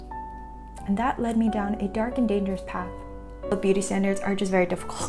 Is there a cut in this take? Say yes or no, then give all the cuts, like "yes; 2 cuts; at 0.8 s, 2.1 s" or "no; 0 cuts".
yes; 1 cut; at 3.5 s